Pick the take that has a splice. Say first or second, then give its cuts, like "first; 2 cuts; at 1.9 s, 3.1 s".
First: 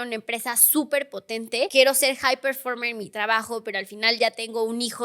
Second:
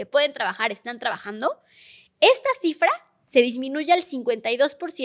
first; 1 cut; at 1.7 s